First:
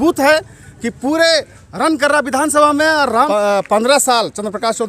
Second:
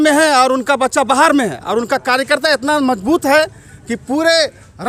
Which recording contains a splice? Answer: first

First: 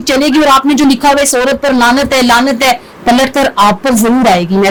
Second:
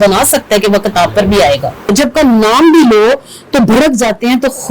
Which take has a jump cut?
second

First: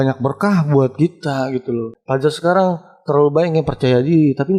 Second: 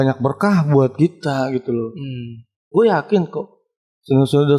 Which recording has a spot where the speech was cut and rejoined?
first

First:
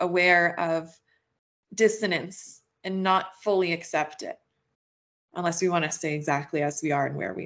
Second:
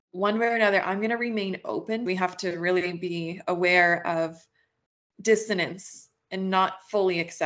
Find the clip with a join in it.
second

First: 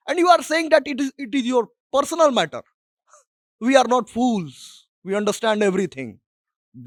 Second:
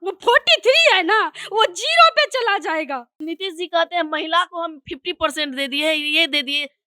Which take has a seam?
second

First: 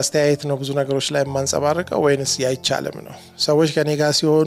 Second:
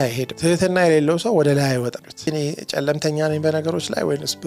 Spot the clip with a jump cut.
second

